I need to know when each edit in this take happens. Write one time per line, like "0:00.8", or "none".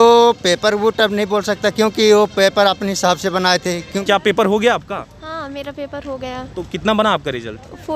0:04.0